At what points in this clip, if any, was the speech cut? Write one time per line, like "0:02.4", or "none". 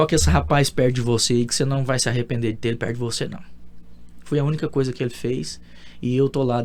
none

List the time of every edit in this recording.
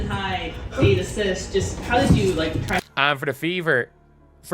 0:02.9

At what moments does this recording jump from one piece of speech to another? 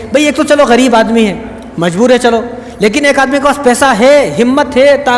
none

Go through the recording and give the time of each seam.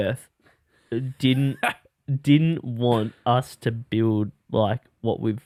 none

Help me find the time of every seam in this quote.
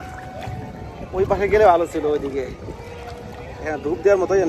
none

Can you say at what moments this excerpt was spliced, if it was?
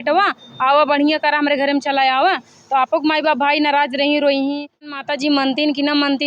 0:04.9

